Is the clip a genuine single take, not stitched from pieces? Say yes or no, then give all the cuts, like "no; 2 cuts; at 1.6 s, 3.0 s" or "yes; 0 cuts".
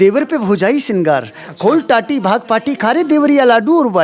yes; 0 cuts